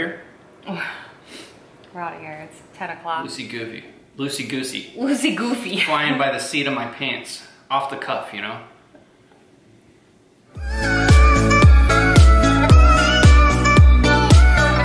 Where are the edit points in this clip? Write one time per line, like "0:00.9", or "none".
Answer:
0:03.3
0:10.8